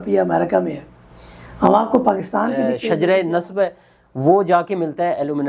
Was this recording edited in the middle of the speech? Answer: yes; 1 cut; at 3.0 s

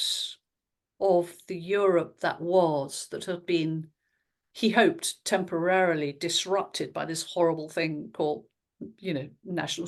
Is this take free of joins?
yes; 0 cuts

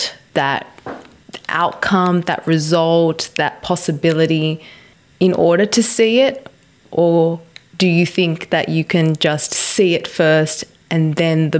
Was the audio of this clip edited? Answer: no; 0 cuts

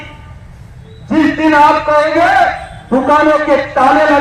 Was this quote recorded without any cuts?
yes; 0 cuts

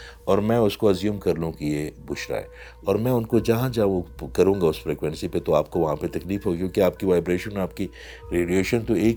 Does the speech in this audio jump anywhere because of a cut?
no; 0 cuts

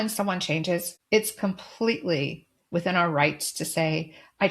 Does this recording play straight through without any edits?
no; 1 cut; at 0.9 s

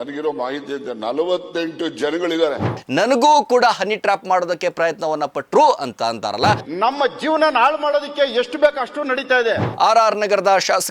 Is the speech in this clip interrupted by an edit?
yes; 3 cuts; at 2.8 s, 6.6 s, 9.7 s

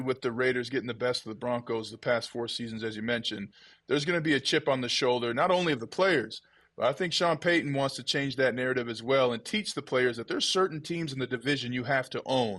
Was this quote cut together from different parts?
no; 0 cuts

